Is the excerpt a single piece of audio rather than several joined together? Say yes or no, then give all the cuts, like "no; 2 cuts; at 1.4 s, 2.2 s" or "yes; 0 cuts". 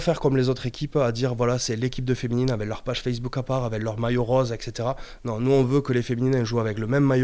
yes; 0 cuts